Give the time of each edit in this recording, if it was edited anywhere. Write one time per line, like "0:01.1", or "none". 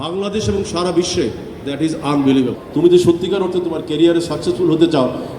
0:02.6